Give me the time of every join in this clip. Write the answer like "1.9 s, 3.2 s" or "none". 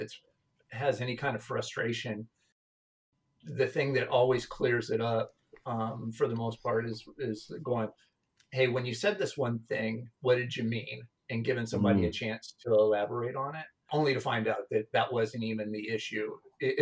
2.6 s, 13.8 s